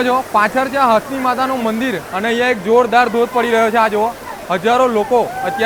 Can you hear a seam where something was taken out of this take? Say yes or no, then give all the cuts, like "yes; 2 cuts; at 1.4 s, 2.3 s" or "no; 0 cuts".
no; 0 cuts